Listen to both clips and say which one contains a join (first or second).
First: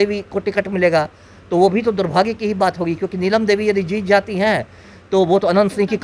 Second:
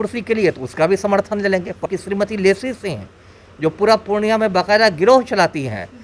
second